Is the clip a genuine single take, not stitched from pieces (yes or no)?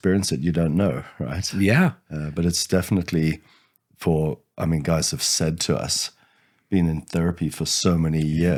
yes